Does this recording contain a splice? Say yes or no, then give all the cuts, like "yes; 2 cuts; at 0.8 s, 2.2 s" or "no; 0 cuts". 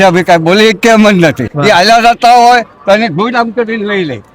yes; 1 cut; at 1.5 s